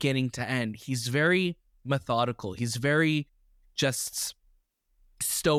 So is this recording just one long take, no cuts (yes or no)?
yes